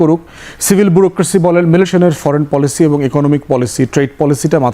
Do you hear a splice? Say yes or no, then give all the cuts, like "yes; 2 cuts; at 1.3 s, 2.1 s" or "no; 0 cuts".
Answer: yes; 1 cut; at 1.9 s